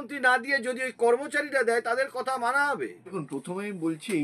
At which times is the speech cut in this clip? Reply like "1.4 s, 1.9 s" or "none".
3.2 s